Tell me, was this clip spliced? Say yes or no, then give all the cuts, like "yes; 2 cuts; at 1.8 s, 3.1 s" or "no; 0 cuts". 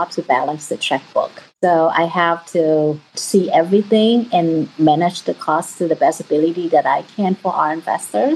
yes; 2 cuts; at 1.4 s, 3.1 s